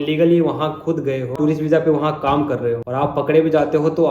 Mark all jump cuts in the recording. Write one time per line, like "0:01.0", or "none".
0:01.3
0:02.8